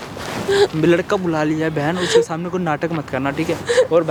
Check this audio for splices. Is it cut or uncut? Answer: uncut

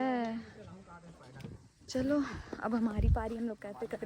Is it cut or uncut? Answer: uncut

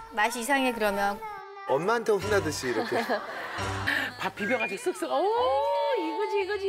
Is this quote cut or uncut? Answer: cut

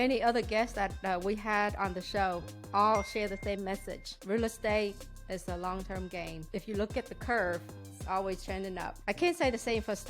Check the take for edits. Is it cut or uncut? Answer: cut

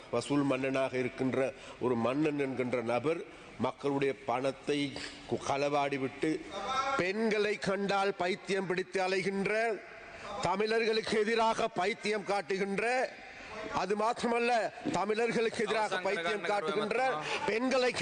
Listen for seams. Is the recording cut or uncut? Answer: cut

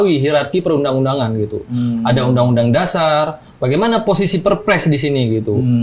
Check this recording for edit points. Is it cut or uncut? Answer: uncut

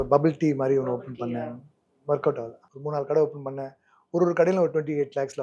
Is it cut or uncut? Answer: uncut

